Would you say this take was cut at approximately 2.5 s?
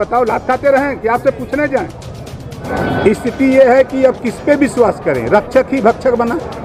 yes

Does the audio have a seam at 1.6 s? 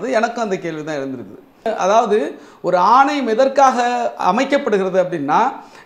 yes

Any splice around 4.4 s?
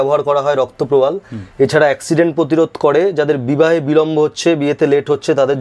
no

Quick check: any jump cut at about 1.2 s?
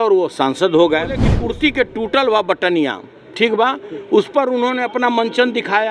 yes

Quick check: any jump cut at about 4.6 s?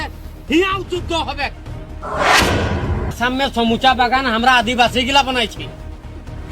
no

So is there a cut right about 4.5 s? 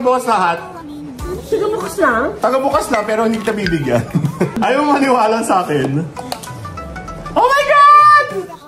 yes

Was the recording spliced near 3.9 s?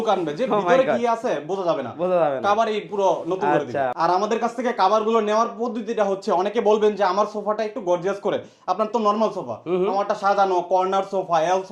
yes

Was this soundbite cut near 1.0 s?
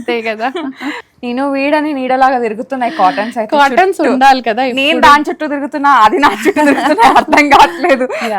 yes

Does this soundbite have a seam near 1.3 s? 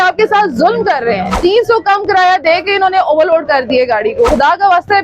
yes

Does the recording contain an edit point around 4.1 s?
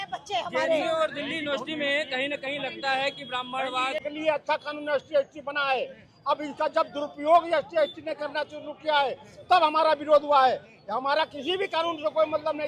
yes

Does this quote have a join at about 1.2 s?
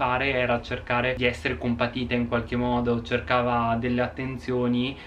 yes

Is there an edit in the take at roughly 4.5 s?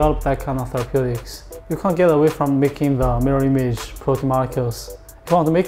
no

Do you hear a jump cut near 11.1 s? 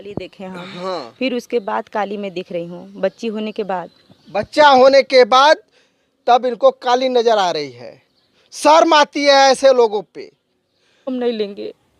yes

